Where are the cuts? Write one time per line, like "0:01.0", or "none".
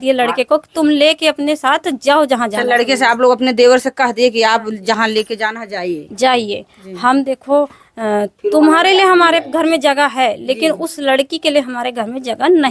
none